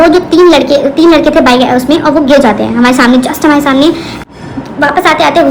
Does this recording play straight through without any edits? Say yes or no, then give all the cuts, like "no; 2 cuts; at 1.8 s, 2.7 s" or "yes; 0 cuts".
no; 1 cut; at 4.2 s